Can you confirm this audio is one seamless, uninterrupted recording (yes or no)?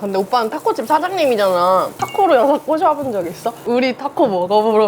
no